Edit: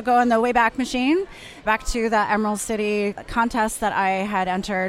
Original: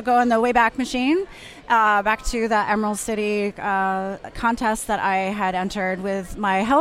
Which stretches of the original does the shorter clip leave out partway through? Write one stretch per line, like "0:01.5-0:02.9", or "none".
0:01.6-0:02.0
0:03.6-0:04.3